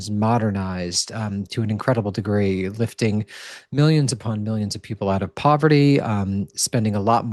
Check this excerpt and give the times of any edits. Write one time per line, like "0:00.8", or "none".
none